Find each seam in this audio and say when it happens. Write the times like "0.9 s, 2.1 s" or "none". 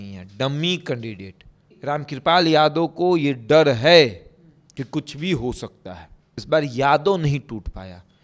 1.7 s, 6.3 s